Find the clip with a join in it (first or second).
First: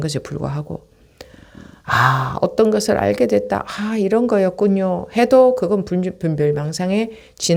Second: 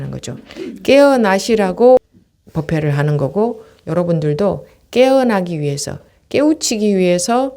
second